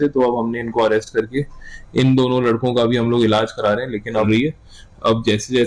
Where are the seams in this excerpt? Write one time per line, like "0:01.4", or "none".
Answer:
0:04.3